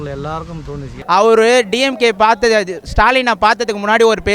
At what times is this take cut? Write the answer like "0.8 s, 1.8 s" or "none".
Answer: 0.9 s